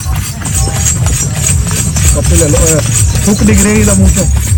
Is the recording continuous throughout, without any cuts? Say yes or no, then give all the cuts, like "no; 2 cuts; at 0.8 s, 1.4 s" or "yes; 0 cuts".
yes; 0 cuts